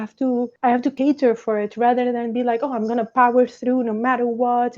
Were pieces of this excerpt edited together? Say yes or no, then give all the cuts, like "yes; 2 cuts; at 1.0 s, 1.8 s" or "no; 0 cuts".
yes; 1 cut; at 0.9 s